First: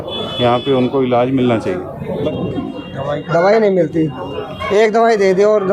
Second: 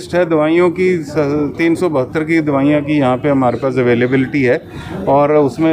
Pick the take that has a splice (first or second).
first